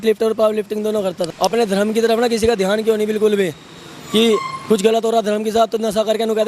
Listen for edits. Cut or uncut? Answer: cut